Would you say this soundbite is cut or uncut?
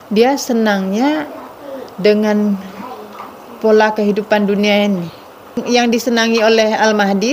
cut